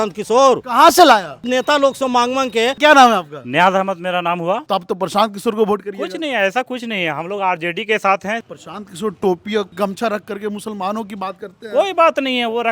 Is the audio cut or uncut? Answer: cut